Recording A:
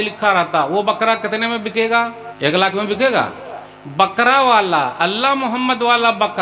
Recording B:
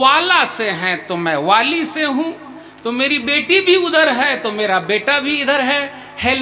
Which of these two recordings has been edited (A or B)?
A